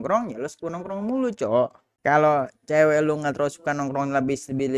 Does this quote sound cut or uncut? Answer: cut